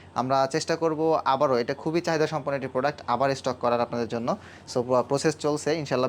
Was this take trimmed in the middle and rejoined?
no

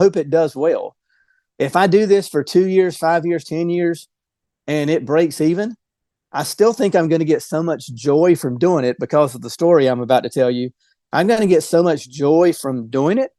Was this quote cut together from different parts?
no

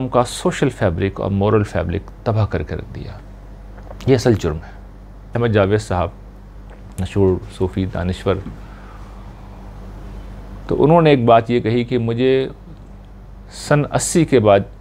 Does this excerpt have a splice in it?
yes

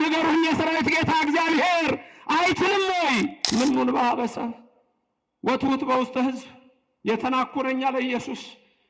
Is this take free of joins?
no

